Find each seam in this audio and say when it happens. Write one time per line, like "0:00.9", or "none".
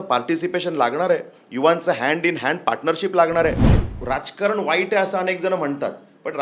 0:03.7